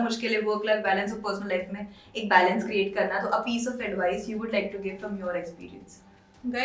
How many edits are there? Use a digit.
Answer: 0